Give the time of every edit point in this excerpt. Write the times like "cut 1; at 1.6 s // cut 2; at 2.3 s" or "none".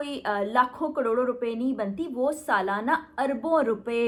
none